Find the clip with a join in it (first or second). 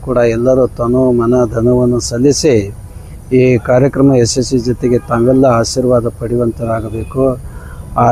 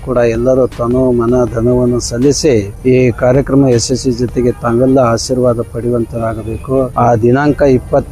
second